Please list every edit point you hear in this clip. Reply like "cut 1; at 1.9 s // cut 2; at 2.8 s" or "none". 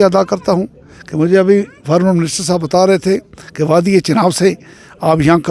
none